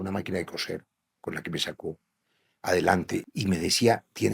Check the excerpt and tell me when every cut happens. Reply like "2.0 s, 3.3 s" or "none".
3.3 s